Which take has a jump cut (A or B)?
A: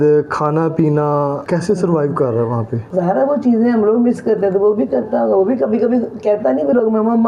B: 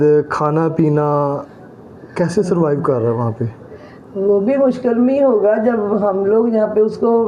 A